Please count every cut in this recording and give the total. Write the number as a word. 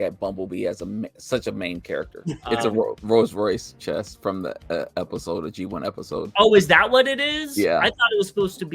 one